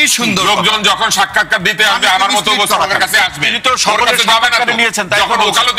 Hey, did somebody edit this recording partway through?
no; 0 cuts

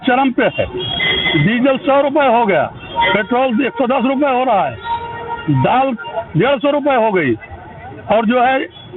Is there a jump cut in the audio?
no; 0 cuts

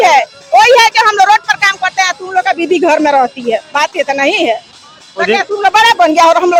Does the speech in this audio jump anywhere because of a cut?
no; 0 cuts

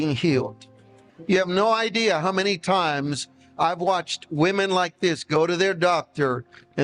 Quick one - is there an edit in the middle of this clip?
yes; 1 cut; at 1.1 s

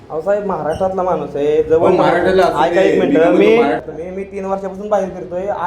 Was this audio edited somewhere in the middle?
yes; 1 cut; at 3.8 s

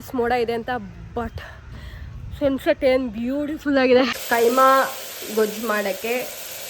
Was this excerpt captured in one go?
no; 1 cut; at 4.2 s

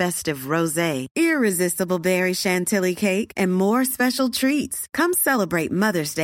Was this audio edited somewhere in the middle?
no; 0 cuts

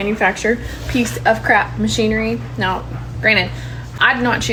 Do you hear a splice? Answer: no; 0 cuts

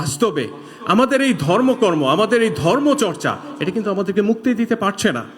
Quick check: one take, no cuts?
yes; 0 cuts

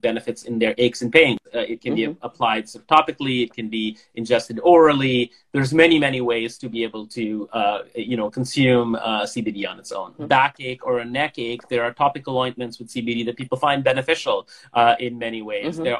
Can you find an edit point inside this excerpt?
no; 0 cuts

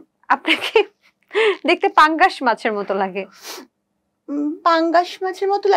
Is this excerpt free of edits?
yes; 0 cuts

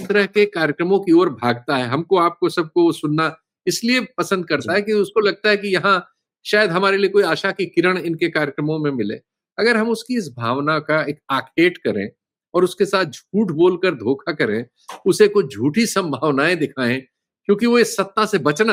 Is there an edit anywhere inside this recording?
no; 0 cuts

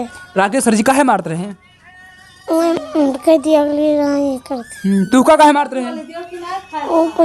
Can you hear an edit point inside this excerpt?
no; 0 cuts

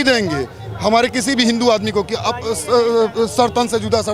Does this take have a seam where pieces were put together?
no; 0 cuts

